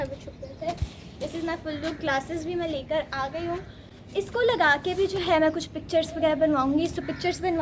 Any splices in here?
no; 0 cuts

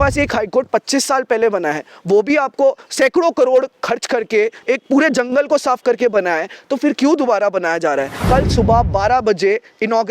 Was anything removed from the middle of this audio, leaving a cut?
yes; 1 cut; at 8.1 s

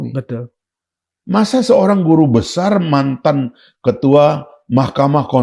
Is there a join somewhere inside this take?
no; 0 cuts

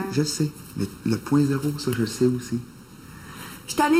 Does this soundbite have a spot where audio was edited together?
no; 0 cuts

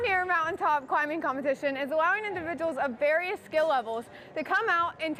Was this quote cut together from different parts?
no; 0 cuts

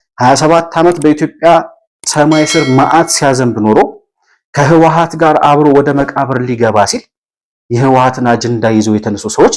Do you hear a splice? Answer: no; 0 cuts

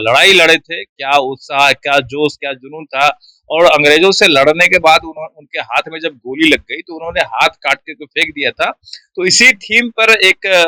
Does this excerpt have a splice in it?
no; 0 cuts

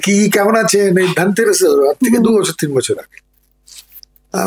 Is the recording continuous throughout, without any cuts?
yes; 0 cuts

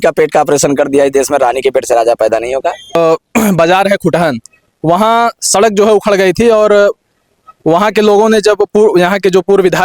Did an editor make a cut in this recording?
yes; 1 cut; at 3.0 s

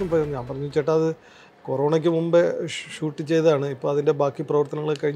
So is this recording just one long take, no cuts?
yes; 0 cuts

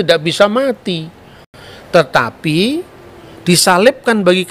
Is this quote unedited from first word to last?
no; 1 cut; at 1.4 s

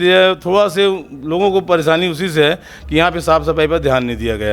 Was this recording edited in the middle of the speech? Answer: no; 0 cuts

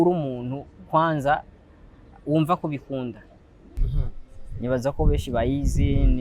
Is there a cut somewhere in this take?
yes; 1 cut; at 3.8 s

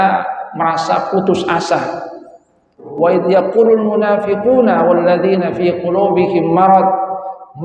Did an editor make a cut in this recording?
yes; 1 cut; at 2.9 s

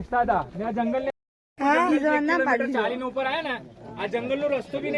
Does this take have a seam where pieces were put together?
yes; 1 cut; at 1.1 s

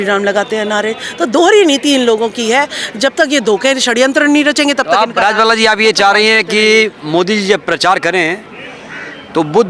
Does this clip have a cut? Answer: no; 0 cuts

